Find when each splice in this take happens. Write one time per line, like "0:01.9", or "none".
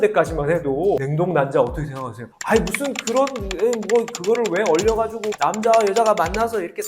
0:01.0